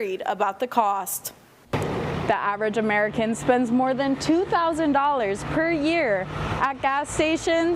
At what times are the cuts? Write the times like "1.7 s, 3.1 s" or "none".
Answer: 1.6 s